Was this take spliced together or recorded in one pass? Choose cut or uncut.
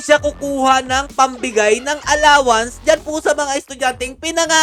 uncut